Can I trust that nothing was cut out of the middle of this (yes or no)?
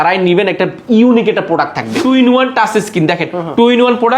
no